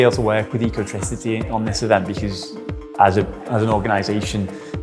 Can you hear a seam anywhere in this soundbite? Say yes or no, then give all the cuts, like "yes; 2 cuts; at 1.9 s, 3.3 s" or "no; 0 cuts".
no; 0 cuts